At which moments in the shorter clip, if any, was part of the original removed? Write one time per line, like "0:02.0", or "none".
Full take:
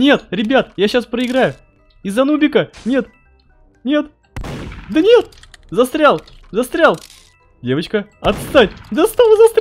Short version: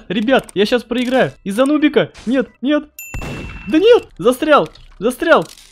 0:01.4
0:02.5
0:04.1